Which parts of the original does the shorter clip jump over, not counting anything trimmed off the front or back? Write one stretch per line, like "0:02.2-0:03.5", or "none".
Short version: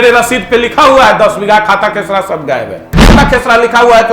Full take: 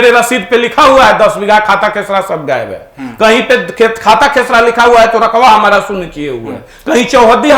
0:03.1-0:04.2